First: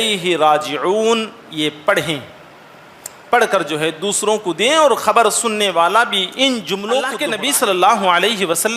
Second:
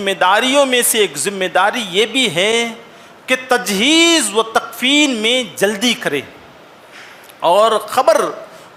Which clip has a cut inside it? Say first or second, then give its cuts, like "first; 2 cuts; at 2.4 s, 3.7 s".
first; 1 cut; at 7.2 s